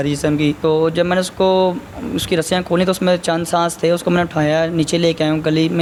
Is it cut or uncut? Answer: uncut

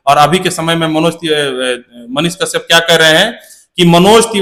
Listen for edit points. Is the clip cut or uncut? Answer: uncut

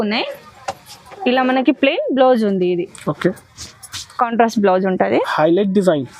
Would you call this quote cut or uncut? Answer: uncut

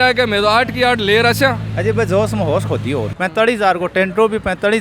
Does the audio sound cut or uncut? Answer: cut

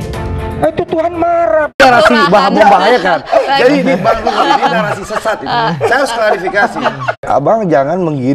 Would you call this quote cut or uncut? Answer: cut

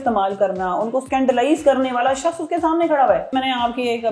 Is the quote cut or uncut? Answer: cut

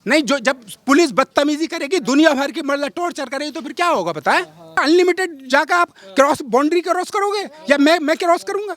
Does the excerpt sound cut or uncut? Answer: cut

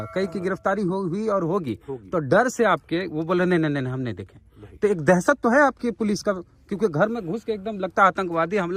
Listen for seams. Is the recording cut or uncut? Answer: uncut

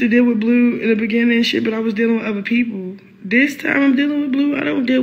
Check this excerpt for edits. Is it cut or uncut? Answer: uncut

